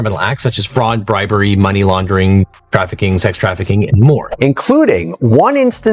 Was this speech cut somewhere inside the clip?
yes; 1 cut; at 4.3 s

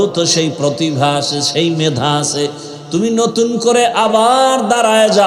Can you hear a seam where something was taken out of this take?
no; 0 cuts

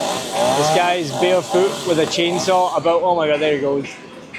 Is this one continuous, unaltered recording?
yes; 0 cuts

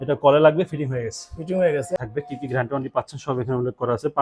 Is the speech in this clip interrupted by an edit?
yes; 1 cut; at 2.0 s

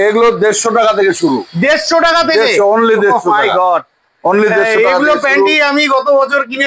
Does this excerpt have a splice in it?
no; 0 cuts

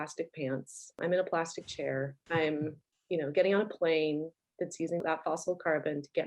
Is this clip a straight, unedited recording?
no; 2 cuts; at 2.2 s, 2.9 s

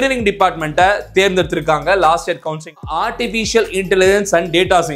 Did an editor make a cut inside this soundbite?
yes; 1 cut; at 3.0 s

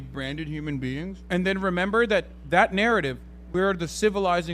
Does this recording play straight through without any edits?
no; 1 cut; at 1.1 s

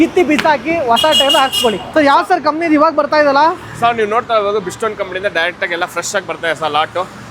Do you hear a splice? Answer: no; 0 cuts

